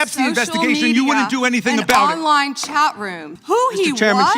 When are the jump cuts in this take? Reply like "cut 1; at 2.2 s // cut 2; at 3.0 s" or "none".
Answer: cut 1; at 3.3 s